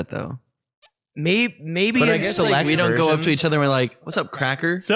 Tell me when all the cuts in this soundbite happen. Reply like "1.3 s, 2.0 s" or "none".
none